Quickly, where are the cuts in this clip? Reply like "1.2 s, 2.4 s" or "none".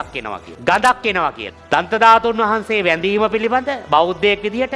1.5 s